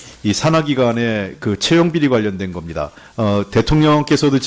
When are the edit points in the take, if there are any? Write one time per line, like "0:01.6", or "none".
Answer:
none